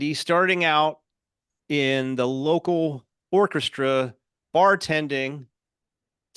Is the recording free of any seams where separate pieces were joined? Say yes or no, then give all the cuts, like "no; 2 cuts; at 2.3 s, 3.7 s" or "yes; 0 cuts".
yes; 0 cuts